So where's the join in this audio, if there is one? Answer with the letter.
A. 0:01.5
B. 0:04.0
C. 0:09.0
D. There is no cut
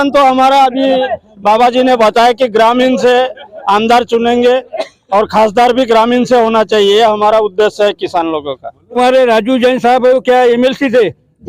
C